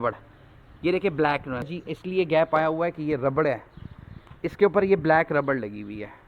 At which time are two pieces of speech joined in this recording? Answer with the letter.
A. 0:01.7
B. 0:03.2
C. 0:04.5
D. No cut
A